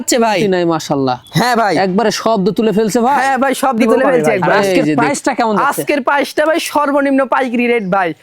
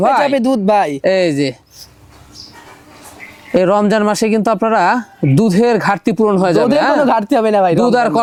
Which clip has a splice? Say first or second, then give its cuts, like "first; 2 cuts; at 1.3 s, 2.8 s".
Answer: first; 1 cut; at 5.0 s